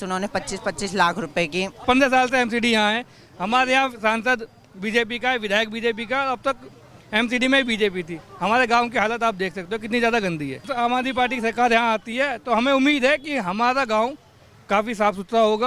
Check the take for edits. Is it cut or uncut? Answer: cut